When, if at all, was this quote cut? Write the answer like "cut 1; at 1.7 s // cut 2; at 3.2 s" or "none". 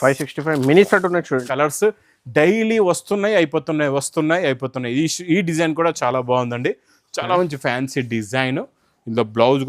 cut 1; at 1.5 s